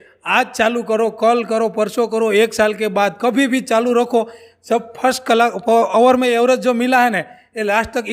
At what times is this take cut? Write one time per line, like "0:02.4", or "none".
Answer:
none